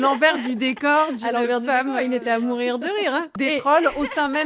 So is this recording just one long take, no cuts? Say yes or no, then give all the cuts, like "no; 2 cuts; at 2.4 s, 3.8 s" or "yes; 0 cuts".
no; 1 cut; at 3.3 s